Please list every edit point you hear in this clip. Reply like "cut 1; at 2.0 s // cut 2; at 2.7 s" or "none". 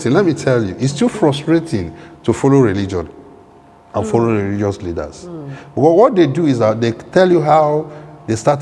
none